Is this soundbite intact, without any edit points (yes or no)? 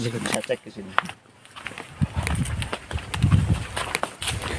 yes